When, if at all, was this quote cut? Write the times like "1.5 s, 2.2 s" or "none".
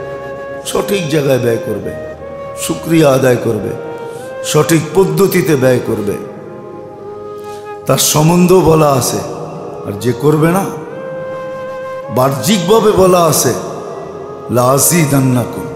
10.7 s, 12.1 s